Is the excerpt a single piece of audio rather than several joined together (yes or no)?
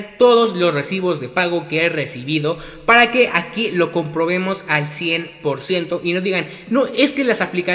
yes